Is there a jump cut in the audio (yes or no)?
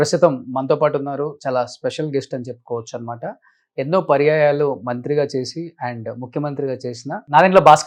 no